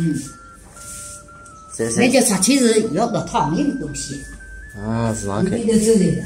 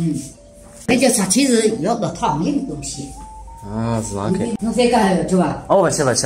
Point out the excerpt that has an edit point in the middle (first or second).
second